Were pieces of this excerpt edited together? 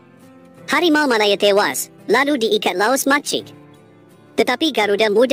no; 0 cuts

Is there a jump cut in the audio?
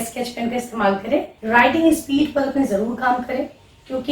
yes; 1 cut; at 1.3 s

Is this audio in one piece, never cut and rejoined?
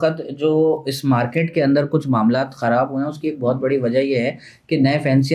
yes; 0 cuts

